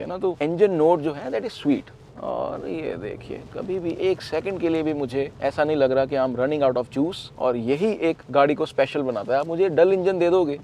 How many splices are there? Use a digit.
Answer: 1